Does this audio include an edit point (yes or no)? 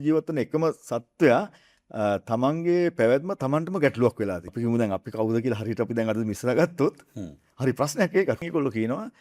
yes